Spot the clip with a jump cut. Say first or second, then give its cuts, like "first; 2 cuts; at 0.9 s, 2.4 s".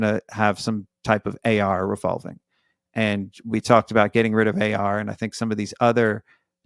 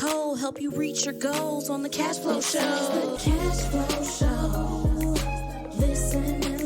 second; 1 cut; at 3.2 s